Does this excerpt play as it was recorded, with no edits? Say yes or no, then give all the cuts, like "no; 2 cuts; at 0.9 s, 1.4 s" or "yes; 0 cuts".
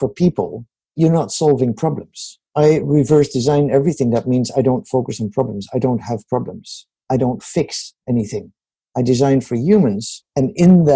no; 2 cuts; at 0.9 s, 2.4 s